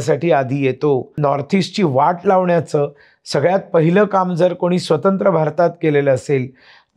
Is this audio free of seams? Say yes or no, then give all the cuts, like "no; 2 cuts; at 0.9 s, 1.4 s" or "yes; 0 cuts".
no; 1 cut; at 1.2 s